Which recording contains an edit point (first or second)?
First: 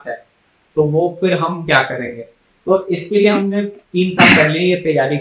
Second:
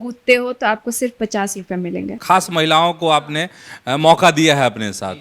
second